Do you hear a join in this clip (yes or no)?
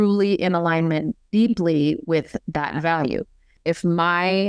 yes